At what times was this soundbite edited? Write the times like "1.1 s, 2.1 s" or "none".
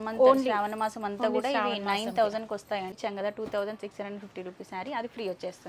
2.9 s